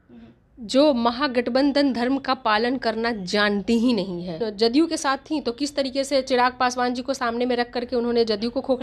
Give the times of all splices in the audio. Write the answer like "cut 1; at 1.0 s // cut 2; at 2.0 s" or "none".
cut 1; at 4.4 s